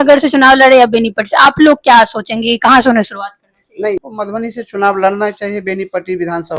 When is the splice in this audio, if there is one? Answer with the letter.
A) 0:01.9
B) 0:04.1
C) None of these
B